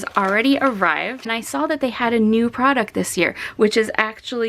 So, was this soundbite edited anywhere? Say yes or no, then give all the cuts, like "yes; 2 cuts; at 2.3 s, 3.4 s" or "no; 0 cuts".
yes; 1 cut; at 1.3 s